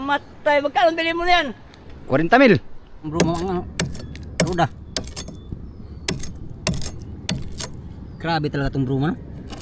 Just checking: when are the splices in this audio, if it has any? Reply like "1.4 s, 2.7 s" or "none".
3.1 s